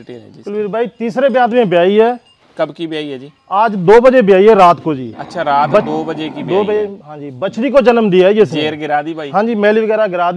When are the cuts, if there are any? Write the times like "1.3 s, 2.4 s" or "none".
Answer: none